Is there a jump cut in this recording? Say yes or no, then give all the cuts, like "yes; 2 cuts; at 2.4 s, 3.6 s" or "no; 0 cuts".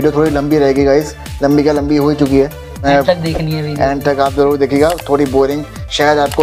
yes; 1 cut; at 2.8 s